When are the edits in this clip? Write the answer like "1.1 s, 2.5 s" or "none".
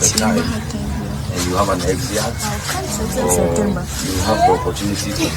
none